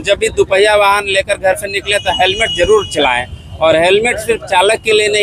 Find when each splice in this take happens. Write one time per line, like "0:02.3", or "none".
none